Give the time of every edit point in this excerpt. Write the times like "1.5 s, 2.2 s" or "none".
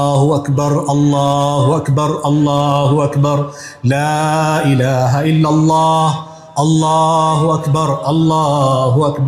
none